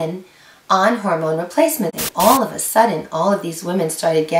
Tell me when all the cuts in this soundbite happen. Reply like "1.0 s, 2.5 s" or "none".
2.0 s